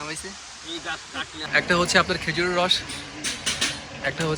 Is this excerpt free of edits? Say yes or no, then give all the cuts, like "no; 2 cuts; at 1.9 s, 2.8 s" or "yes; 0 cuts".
no; 1 cut; at 1.5 s